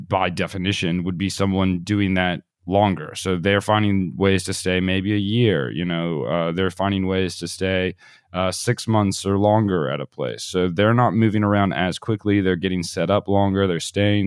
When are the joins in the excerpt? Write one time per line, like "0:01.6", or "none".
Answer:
none